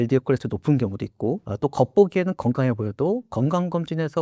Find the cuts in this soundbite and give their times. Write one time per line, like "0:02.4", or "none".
0:01.5